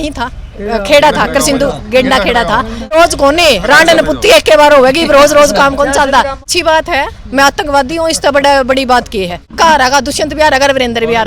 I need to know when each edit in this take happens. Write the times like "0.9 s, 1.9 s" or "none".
2.9 s, 6.4 s, 9.5 s